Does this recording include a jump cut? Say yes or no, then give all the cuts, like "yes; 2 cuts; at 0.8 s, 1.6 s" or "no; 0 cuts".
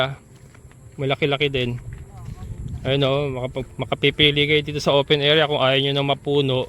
no; 0 cuts